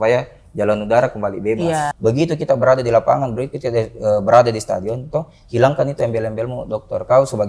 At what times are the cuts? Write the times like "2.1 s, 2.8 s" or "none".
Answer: 1.9 s